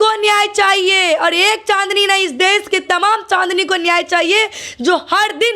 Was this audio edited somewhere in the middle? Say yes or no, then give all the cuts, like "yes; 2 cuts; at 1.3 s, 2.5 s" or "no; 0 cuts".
no; 0 cuts